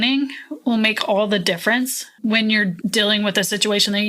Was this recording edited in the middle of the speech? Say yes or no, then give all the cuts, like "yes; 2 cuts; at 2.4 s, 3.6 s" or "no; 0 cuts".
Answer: yes; 1 cut; at 2.8 s